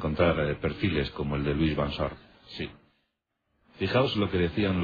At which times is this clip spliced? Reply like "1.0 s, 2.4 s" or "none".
3.9 s